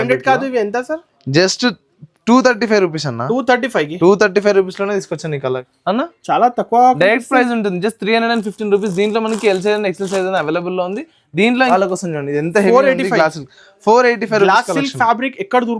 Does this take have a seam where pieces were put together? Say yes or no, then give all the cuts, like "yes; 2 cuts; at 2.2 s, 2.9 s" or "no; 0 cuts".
yes; 2 cuts; at 5.7 s, 11.7 s